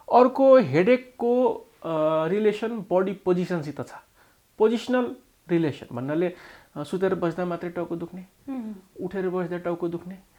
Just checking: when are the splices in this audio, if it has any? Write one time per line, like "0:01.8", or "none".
none